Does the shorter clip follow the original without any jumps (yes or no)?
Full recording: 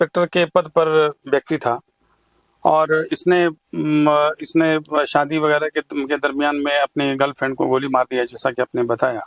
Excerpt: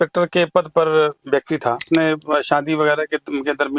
no